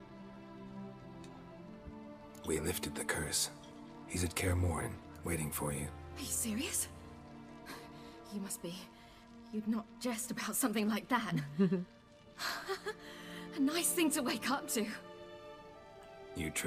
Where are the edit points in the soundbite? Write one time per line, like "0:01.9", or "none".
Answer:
0:02.9